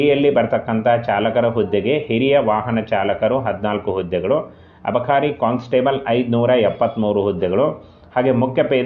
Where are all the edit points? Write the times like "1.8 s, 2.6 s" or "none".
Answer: none